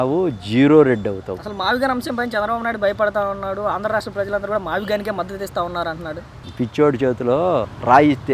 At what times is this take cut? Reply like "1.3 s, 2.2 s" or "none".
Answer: none